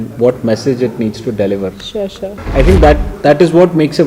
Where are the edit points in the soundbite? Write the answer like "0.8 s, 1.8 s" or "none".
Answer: 2.4 s